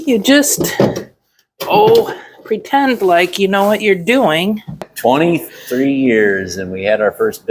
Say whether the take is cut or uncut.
cut